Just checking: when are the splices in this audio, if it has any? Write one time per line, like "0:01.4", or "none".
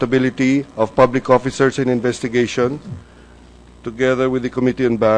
0:03.4

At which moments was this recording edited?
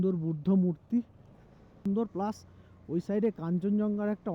0:01.9

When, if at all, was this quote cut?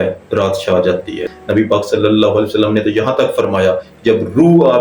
0:01.2

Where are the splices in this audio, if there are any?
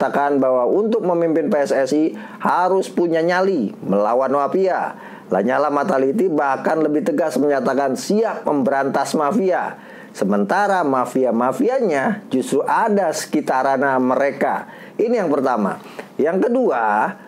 none

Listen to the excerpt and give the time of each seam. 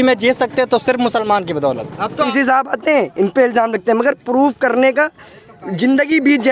0:02.3

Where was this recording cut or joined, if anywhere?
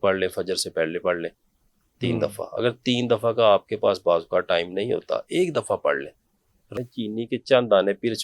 0:06.9

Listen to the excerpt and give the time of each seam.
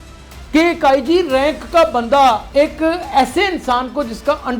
0:02.4

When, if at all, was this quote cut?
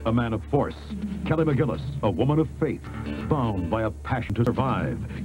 0:03.1
0:04.3

